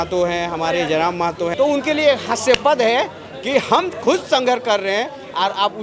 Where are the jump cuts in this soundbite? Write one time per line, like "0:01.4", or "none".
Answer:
0:01.5